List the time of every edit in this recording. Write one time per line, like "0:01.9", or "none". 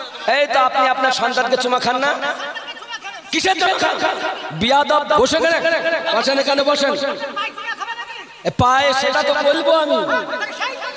none